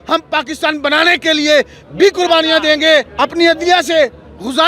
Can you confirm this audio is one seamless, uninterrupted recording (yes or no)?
no